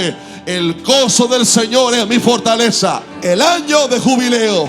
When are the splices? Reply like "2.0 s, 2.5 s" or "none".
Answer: 3.1 s